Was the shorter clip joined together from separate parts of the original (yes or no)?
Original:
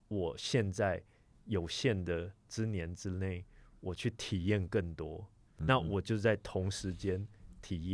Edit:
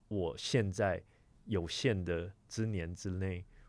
no